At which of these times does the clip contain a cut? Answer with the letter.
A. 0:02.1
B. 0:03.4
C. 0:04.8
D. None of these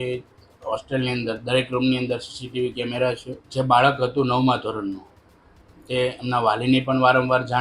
B